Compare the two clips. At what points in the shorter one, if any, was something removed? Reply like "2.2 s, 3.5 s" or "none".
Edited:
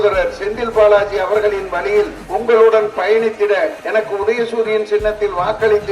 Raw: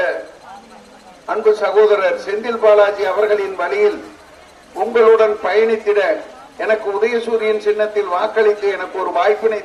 2.2 s, 3.8 s